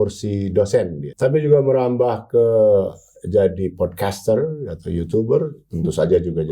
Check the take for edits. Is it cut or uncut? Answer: cut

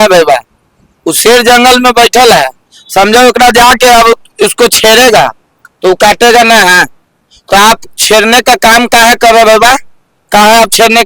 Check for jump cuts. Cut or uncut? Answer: uncut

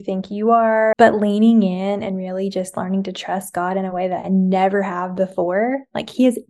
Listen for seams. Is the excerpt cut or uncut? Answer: cut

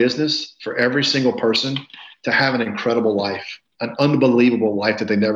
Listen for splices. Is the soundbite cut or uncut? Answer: uncut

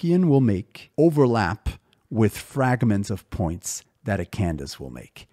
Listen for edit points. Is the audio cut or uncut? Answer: uncut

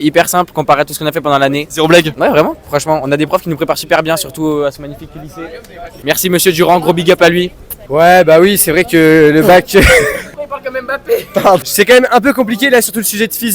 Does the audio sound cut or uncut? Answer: uncut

